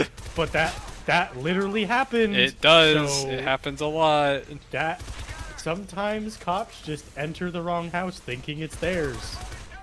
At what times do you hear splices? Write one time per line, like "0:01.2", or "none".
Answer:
none